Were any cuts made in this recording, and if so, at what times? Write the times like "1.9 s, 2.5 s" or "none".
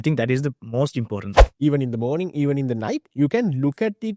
1.4 s